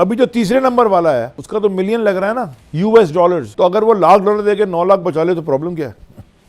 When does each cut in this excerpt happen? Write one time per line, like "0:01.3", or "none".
0:01.4
0:02.6
0:03.5